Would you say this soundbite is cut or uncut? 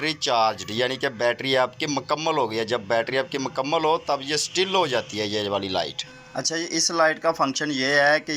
uncut